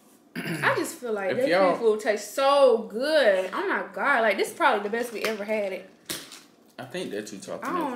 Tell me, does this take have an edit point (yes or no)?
no